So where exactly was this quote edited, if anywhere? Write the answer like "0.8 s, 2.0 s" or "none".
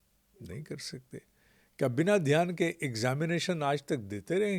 none